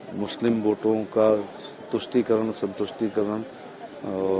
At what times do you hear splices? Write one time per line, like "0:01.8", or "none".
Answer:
none